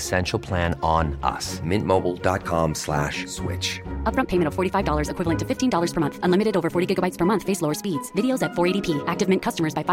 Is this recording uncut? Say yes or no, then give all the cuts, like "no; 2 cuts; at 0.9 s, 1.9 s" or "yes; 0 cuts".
yes; 0 cuts